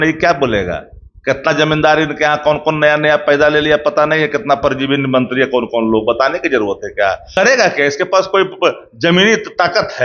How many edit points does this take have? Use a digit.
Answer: 1